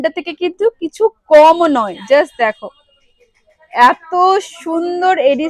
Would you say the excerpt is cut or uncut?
uncut